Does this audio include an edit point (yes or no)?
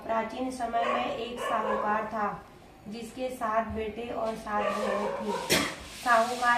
no